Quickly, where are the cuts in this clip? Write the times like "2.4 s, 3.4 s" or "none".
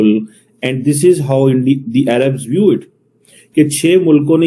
none